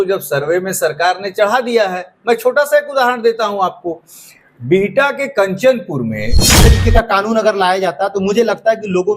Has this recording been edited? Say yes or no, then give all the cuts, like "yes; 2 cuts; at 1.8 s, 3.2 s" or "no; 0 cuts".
yes; 1 cut; at 6.6 s